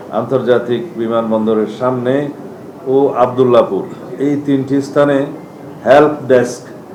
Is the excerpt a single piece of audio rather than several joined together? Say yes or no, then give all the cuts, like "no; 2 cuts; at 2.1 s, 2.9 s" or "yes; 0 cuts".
yes; 0 cuts